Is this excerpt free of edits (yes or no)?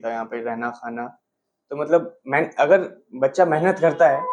yes